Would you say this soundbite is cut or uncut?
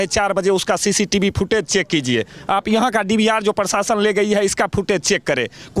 uncut